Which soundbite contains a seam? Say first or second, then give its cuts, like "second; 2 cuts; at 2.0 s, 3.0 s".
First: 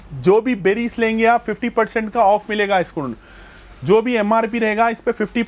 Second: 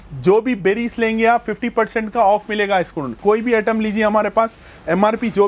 second; 1 cut; at 3.2 s